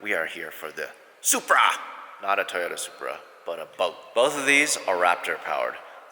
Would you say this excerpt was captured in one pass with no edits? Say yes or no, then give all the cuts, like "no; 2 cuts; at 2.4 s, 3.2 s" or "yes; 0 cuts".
yes; 0 cuts